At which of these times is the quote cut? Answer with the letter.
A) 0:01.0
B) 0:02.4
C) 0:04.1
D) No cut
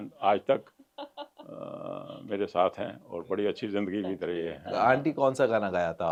D